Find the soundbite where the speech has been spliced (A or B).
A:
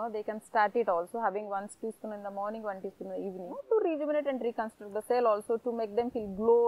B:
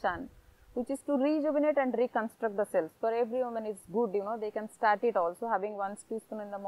A